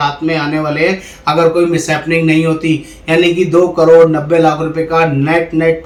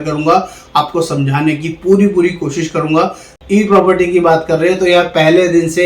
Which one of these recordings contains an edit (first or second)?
second